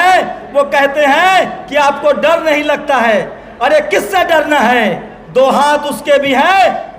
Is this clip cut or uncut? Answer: uncut